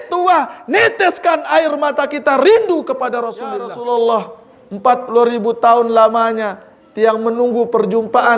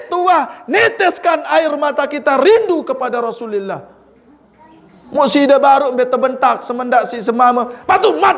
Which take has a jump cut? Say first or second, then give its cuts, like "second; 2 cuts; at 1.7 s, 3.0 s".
first; 1 cut; at 3.7 s